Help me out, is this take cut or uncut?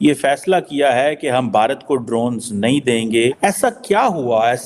cut